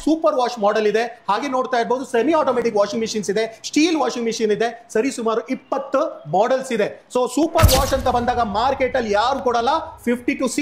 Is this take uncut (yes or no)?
yes